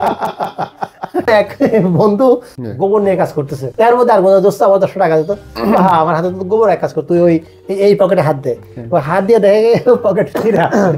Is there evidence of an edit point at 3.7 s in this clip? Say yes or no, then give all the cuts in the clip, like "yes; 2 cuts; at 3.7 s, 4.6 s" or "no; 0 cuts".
yes; 3 cuts; at 1.3 s, 2.6 s, 3.7 s